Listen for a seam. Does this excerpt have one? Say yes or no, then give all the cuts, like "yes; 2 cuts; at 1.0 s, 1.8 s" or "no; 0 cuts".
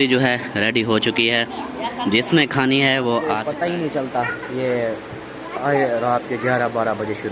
yes; 1 cut; at 3.5 s